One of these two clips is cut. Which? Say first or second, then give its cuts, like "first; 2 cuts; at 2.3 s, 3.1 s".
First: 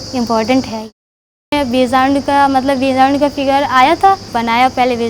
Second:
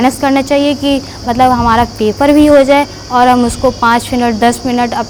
first; 2 cuts; at 1.0 s, 4.3 s